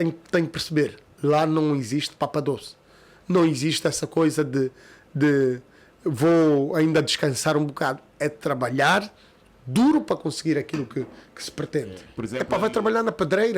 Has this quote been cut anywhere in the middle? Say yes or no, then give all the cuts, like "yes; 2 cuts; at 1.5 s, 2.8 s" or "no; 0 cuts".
yes; 1 cut; at 12.2 s